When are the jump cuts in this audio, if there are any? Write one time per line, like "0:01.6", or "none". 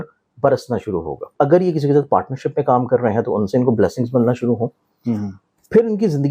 0:01.3